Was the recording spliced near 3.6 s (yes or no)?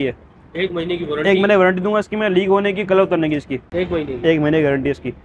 yes